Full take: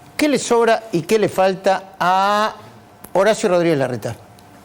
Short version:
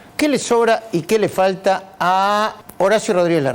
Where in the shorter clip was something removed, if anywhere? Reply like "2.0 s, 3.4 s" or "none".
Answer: 2.6 s